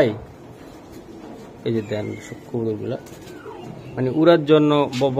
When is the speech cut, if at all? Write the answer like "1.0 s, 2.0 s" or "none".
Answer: none